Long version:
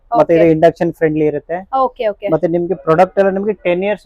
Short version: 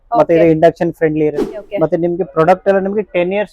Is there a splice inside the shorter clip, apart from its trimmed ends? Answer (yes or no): yes